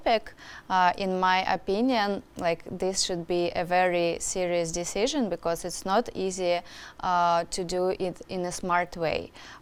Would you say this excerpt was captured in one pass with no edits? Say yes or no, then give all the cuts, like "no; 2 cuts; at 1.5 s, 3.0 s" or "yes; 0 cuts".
yes; 0 cuts